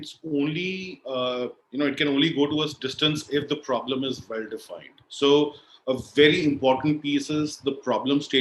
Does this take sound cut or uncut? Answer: uncut